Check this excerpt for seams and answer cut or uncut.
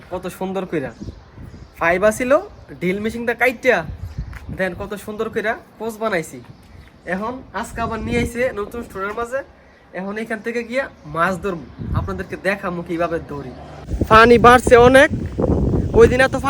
cut